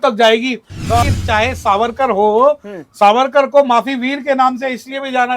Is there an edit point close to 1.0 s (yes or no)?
yes